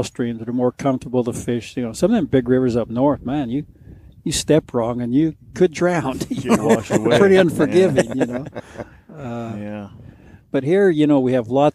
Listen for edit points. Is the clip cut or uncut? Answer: uncut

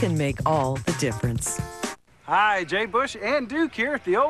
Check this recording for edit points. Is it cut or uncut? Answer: cut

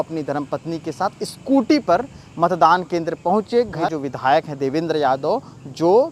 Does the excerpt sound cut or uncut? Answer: cut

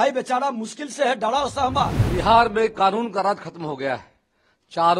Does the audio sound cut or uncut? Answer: cut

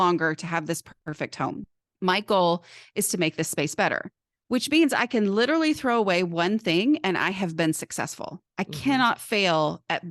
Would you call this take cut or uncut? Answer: cut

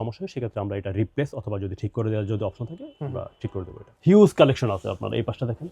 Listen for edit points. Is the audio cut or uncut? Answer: cut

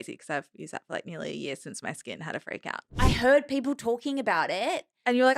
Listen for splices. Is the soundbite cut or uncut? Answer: cut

